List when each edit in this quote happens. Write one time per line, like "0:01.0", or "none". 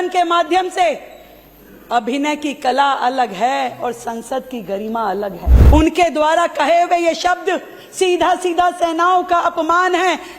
0:05.5

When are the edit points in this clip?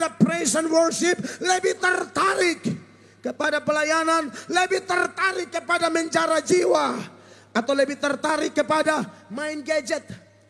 none

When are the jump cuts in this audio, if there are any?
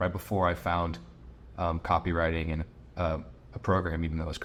none

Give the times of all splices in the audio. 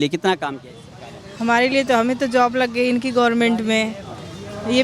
none

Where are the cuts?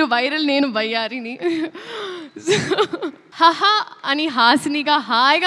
0:03.2

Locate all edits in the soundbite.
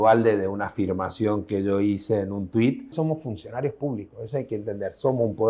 0:02.9

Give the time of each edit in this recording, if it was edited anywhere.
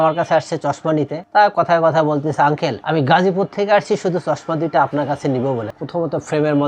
0:01.2
0:02.8
0:05.6

